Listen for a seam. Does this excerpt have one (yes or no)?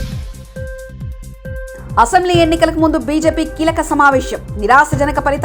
yes